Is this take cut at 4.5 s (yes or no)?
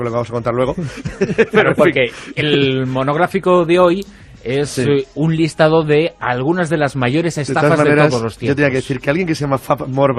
no